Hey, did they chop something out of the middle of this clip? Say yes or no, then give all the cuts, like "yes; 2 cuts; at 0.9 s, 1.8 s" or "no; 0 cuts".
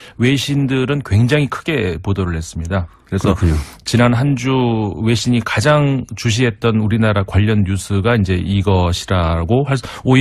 no; 0 cuts